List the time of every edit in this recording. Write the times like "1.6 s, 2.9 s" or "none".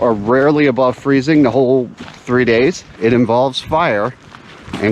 2.9 s